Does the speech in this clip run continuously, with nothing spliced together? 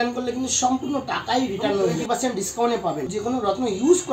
no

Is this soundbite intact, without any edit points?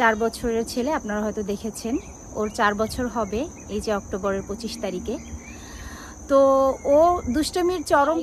yes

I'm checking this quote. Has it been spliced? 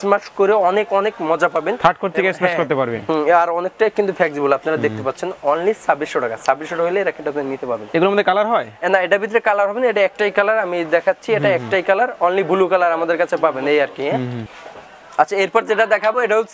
no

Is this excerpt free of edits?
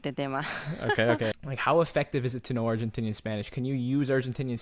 no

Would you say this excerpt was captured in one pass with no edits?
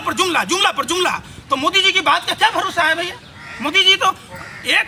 yes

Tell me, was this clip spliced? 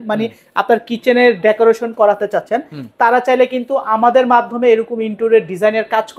no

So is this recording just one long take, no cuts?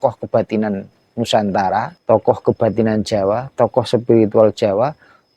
no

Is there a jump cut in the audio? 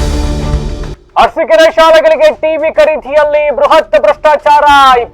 yes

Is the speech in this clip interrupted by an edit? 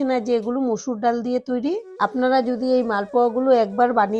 yes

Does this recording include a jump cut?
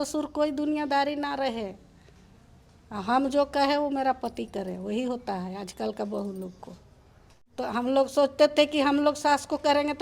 yes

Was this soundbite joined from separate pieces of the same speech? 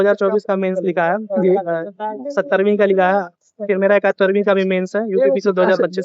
no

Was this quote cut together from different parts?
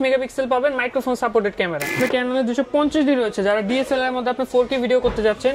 yes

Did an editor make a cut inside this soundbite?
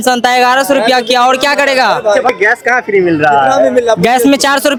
no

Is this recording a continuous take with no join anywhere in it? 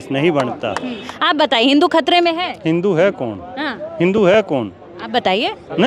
no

